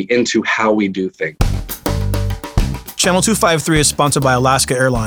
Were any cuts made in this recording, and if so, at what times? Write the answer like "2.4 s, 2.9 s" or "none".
1.3 s

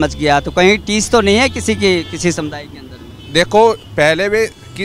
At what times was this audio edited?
none

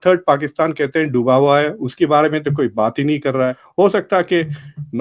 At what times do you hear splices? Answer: 3.6 s

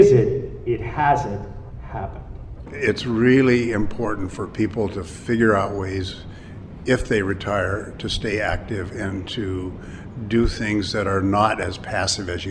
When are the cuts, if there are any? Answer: 2.7 s

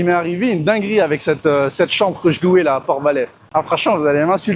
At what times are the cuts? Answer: 3.4 s

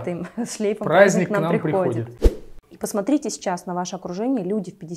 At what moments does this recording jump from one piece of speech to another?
2.5 s

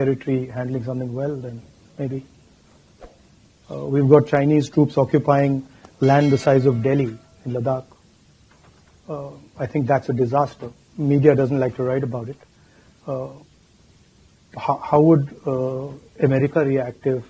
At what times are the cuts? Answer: none

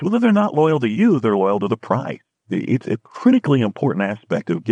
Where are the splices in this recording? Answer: none

